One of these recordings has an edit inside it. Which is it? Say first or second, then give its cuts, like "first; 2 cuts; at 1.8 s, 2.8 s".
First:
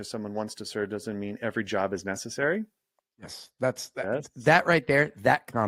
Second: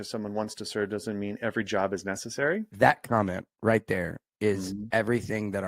second; 1 cut; at 2.7 s